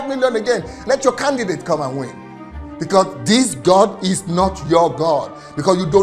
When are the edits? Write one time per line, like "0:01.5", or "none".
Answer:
none